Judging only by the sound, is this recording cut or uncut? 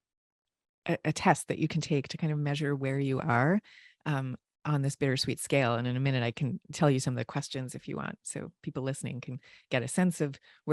uncut